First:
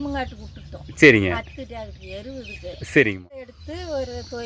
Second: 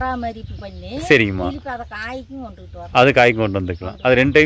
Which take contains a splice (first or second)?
first